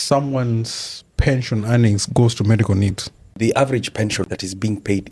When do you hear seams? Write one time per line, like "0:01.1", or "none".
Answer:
0:03.3